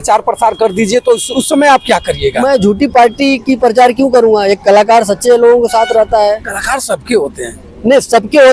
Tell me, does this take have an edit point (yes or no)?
no